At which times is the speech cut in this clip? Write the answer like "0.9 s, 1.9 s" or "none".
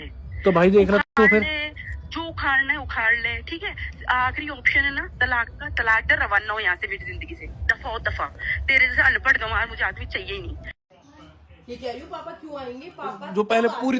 none